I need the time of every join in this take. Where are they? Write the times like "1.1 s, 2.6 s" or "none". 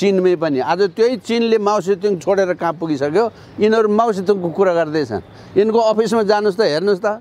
none